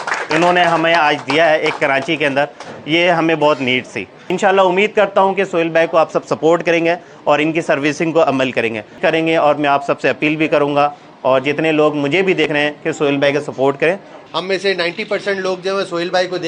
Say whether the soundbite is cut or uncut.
cut